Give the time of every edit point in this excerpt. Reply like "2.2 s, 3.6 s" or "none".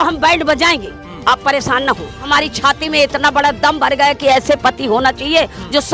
2.2 s

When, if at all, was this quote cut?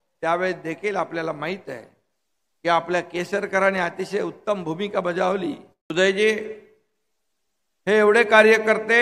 5.7 s

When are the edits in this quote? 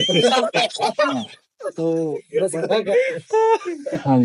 none

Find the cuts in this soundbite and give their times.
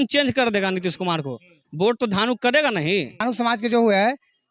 3.2 s

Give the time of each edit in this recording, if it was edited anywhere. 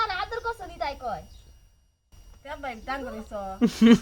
2.2 s

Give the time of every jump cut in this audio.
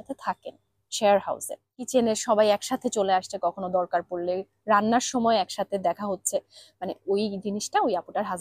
1.9 s

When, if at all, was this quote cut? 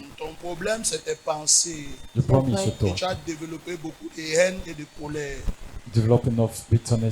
none

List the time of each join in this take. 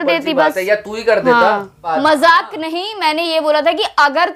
1.9 s

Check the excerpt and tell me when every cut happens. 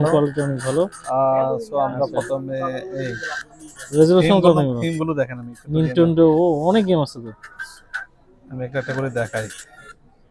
none

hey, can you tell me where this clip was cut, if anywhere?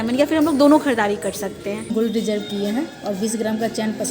1.9 s

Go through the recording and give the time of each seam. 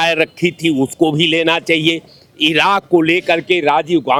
none

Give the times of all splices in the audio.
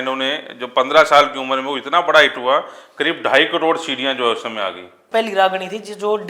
5.1 s

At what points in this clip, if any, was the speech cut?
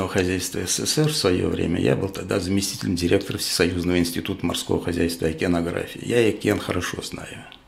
none

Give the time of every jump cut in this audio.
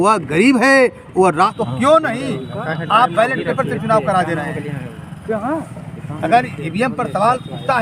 1.5 s

